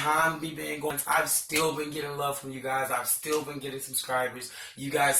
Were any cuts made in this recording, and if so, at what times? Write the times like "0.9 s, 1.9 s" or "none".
0.9 s